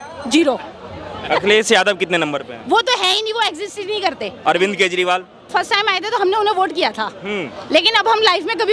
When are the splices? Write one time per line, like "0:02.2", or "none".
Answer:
0:01.2
0:04.3
0:05.5